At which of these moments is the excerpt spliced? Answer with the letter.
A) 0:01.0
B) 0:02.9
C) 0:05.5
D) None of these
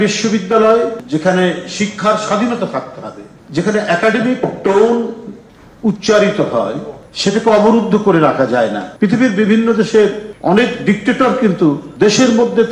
A